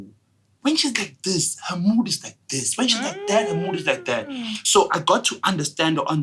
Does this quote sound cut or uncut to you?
uncut